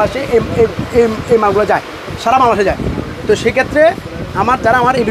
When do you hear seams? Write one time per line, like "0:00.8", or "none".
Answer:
none